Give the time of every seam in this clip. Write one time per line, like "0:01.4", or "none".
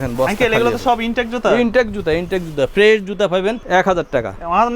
0:03.6